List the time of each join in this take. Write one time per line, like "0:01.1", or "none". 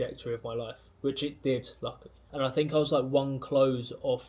0:02.3